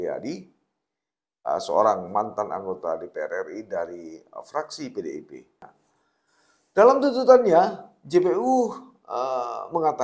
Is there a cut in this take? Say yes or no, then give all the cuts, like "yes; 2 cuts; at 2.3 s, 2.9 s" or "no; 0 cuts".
yes; 1 cut; at 5.7 s